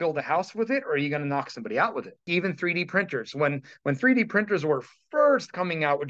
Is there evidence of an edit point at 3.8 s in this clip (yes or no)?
no